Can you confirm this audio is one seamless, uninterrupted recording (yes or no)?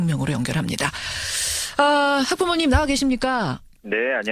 yes